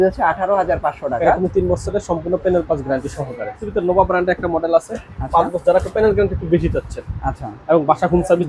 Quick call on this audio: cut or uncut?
cut